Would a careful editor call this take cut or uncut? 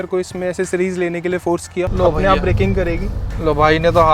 cut